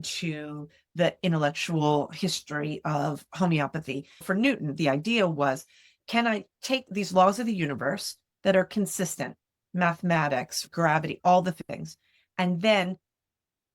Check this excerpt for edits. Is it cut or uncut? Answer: cut